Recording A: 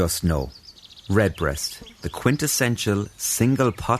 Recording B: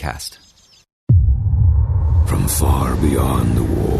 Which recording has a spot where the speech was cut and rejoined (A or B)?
B